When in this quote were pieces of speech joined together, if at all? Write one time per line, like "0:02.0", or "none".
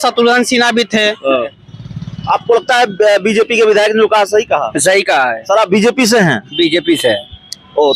0:01.6